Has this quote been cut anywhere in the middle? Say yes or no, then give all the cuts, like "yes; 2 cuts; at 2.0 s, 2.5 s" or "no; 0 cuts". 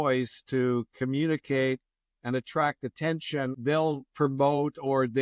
yes; 1 cut; at 3.6 s